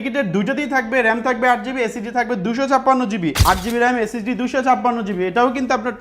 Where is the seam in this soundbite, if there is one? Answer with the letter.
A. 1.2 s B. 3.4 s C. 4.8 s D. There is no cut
B